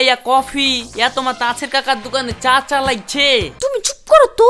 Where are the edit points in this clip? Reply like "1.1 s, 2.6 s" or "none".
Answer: 3.5 s